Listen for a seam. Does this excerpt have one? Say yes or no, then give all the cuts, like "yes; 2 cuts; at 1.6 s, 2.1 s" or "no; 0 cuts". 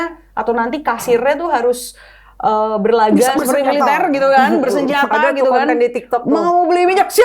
no; 0 cuts